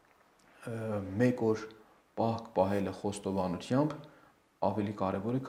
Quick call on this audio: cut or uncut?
uncut